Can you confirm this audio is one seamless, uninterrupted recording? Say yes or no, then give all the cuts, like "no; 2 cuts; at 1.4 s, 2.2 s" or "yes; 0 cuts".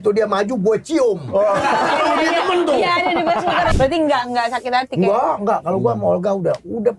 no; 1 cut; at 3.7 s